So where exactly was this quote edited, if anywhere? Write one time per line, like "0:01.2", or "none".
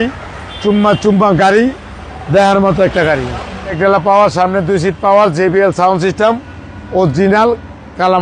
0:03.8